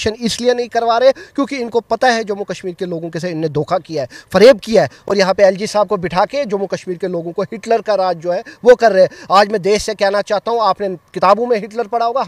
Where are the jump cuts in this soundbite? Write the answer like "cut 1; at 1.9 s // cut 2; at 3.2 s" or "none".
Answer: none